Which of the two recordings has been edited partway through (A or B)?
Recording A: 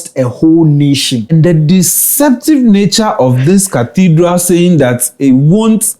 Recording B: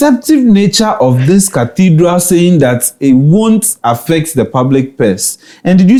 A